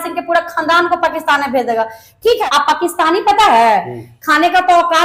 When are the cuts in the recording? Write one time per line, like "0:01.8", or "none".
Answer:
0:02.4